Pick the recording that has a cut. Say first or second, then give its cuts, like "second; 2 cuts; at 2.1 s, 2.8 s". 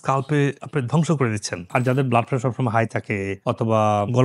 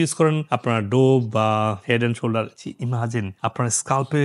first; 1 cut; at 1.5 s